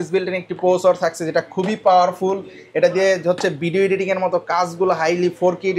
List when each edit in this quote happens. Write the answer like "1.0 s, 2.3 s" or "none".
none